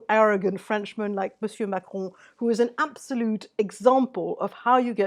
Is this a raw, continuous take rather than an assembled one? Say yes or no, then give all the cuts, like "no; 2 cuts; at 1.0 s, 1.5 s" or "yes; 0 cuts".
yes; 0 cuts